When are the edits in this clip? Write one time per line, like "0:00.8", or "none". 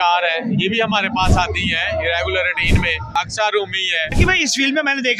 0:03.2
0:04.1